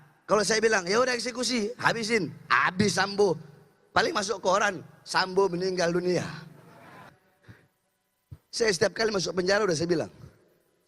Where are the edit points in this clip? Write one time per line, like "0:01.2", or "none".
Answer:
0:07.1